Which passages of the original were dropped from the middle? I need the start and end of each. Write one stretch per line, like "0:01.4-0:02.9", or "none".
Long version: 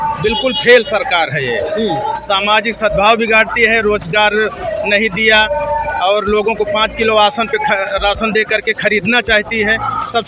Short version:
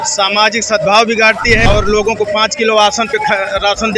0:03.8-0:06.1